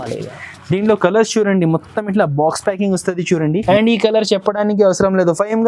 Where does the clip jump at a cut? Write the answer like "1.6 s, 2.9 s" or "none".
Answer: 3.6 s